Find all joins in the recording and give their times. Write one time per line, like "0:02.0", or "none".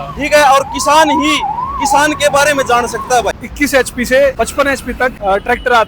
0:03.4
0:04.6